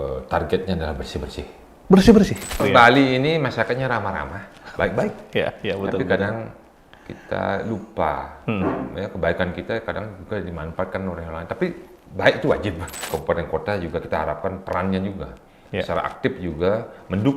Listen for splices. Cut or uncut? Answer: cut